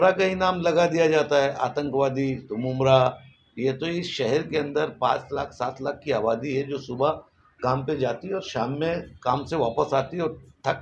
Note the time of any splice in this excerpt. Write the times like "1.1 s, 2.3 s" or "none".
none